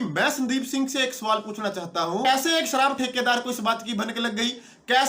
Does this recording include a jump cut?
yes; 1 cut; at 2.2 s

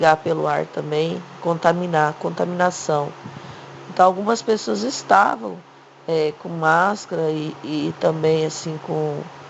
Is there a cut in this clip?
yes; 1 cut; at 2.8 s

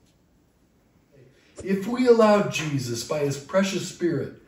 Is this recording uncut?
no; 1 cut; at 1.4 s

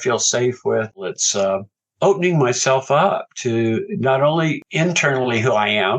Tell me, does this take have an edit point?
yes; 1 cut; at 1.1 s

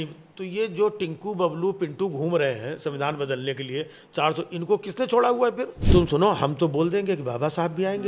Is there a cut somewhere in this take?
yes; 1 cut; at 5.7 s

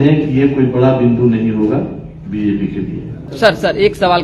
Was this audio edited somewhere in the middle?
yes; 1 cut; at 3.3 s

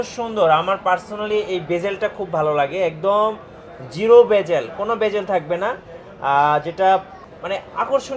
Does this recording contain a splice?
no; 0 cuts

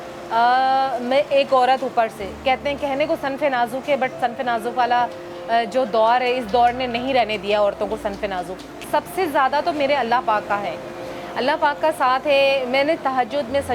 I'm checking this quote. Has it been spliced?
yes; 1 cut; at 8.9 s

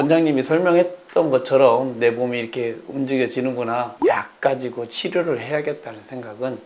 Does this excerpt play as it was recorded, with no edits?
no; 1 cut; at 4.0 s

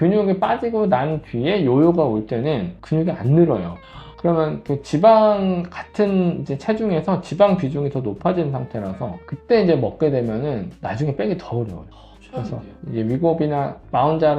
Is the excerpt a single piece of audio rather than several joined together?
yes; 0 cuts

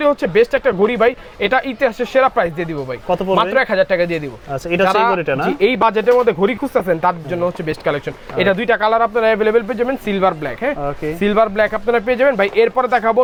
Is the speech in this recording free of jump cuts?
yes; 0 cuts

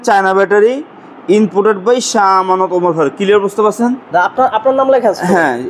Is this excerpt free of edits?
yes; 0 cuts

